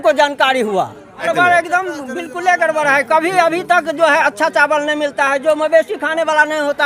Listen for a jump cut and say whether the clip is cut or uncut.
cut